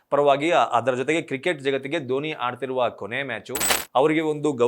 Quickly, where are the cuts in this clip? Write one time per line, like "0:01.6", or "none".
0:03.7

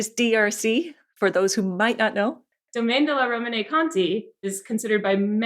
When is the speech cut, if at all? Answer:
0:04.5

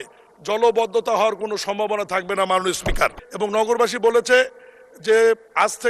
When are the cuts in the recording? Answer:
0:03.2

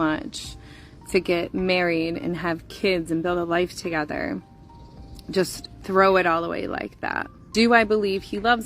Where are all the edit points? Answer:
0:07.3

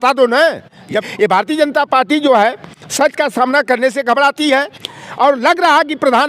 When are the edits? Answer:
0:01.0
0:04.8

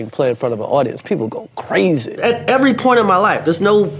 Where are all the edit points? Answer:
0:02.2

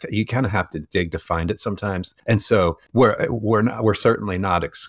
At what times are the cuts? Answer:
0:02.1
0:02.8

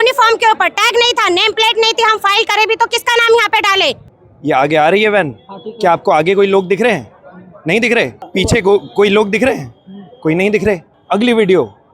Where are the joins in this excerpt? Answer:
0:04.1
0:08.2
0:10.9

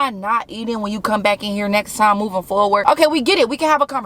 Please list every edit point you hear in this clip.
0:02.8

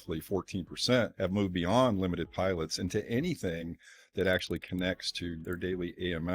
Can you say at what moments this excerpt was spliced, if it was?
0:01.1
0:05.4

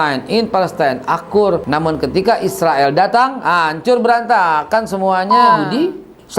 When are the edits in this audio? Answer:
0:01.6
0:05.6

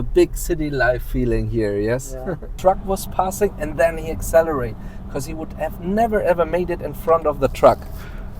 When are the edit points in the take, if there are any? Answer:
0:02.5

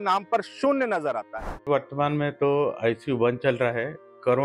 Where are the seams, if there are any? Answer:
0:01.7

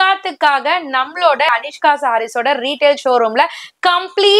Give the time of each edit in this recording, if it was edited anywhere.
0:01.5

